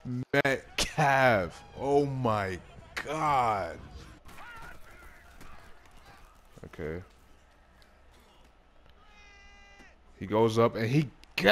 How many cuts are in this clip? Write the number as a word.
one